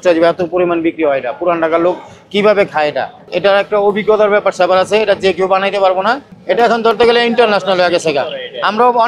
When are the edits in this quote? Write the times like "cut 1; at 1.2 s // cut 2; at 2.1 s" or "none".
cut 1; at 3.2 s // cut 2; at 6.3 s